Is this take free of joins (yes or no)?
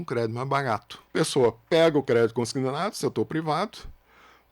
no